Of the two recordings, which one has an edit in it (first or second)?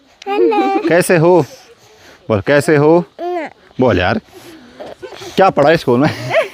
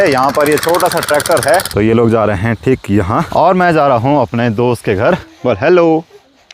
second